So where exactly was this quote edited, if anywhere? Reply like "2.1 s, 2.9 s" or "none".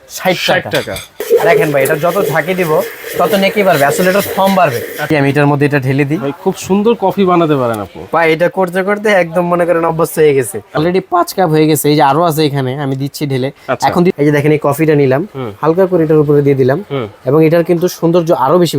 1.2 s, 5.1 s, 10.8 s, 14.1 s